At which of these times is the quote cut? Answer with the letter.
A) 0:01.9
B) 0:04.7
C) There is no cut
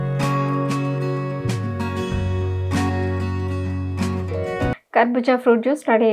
B